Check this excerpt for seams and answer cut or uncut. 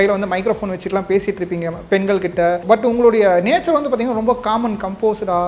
cut